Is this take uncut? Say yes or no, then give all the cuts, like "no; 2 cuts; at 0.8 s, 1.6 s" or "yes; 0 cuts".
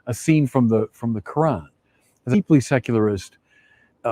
no; 1 cut; at 2.3 s